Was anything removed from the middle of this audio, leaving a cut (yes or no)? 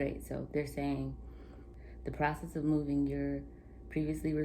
yes